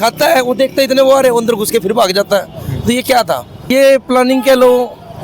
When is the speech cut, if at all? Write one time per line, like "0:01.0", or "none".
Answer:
0:03.7